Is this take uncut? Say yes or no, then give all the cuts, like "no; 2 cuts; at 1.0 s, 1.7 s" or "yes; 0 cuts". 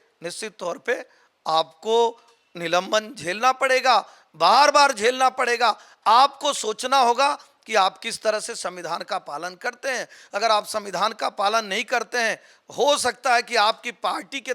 yes; 0 cuts